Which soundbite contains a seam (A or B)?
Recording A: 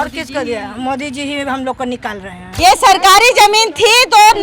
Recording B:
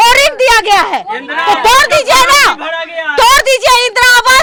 A